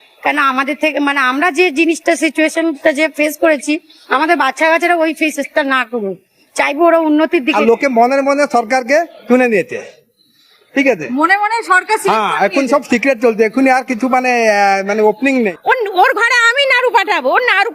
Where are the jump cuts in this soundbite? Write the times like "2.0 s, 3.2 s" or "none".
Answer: 7.4 s, 15.6 s